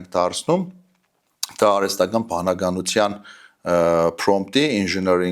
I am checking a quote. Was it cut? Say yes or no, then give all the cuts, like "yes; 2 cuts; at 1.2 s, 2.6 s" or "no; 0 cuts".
no; 0 cuts